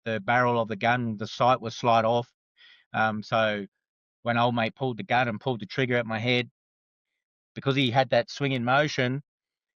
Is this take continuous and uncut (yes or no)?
yes